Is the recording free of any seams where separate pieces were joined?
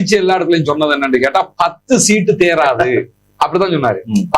yes; 0 cuts

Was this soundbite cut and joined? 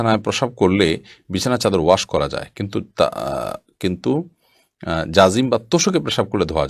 no; 0 cuts

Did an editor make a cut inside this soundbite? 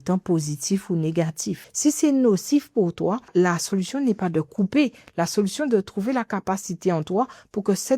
yes; 2 cuts; at 1.6 s, 3.3 s

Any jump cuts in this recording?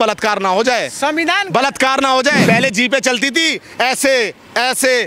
yes; 1 cut; at 2.4 s

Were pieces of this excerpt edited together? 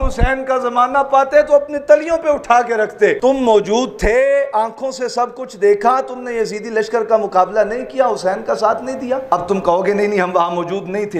yes; 2 cuts; at 3.2 s, 9.2 s

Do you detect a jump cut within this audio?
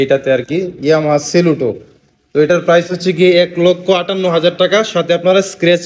no; 0 cuts

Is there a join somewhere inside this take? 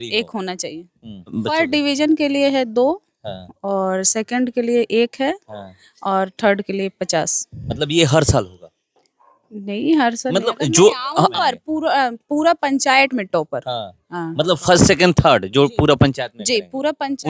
yes; 2 cuts; at 1.3 s, 11.3 s

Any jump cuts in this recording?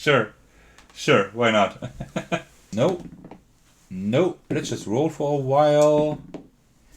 yes; 1 cut; at 2.6 s

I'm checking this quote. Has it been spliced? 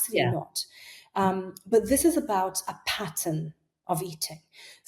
no; 0 cuts

